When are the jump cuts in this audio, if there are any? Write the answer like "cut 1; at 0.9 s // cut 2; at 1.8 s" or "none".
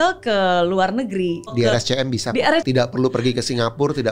cut 1; at 1.5 s // cut 2; at 2.6 s